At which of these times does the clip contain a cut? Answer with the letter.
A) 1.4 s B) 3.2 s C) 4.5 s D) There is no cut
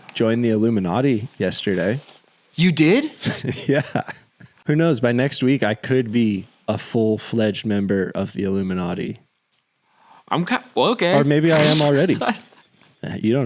C